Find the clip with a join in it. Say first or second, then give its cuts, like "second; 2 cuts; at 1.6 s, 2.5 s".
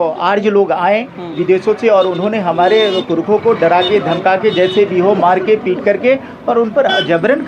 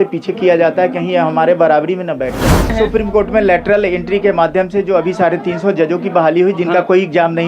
second; 1 cut; at 2.7 s